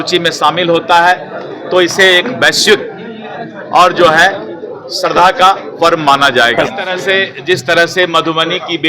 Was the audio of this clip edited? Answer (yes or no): yes